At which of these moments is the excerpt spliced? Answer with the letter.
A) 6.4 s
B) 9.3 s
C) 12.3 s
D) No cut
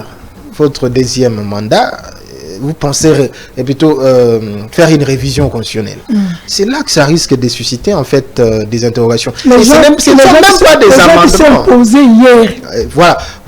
D